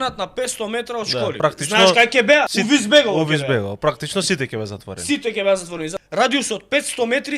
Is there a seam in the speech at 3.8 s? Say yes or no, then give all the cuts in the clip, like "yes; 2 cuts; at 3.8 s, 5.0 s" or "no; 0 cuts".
no; 3 cuts; at 1.4 s, 2.5 s, 5.9 s